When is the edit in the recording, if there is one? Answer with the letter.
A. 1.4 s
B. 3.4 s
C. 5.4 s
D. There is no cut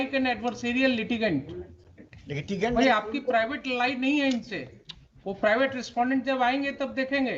D